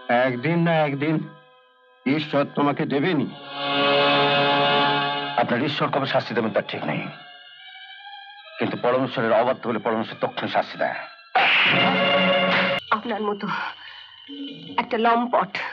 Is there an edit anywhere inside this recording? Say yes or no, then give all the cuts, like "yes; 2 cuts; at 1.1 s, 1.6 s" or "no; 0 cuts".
yes; 1 cut; at 12.8 s